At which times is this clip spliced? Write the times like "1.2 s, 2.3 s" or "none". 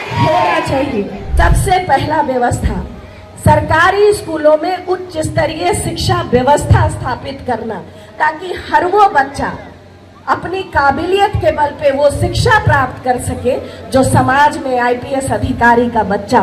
1.2 s

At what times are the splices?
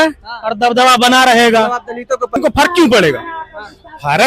2.4 s

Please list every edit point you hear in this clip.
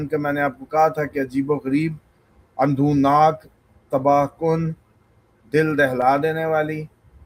none

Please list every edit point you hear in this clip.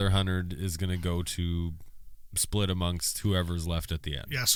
none

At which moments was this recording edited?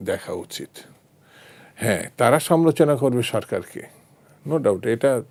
none

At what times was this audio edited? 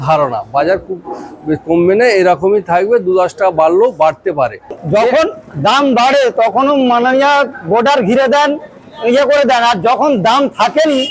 4.8 s

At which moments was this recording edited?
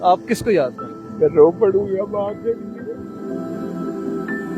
3.0 s

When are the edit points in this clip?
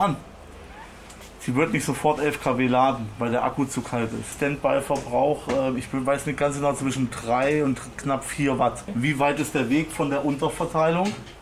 4.3 s, 8.9 s

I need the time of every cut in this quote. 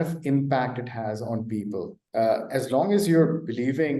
2.0 s

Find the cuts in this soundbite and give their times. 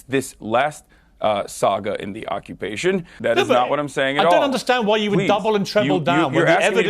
3.1 s

